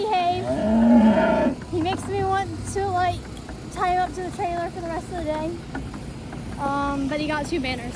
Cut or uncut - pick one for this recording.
uncut